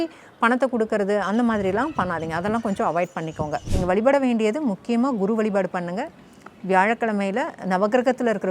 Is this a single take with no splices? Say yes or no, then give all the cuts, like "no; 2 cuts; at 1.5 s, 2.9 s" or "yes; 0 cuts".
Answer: no; 1 cut; at 3.7 s